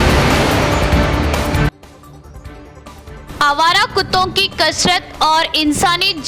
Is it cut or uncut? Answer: cut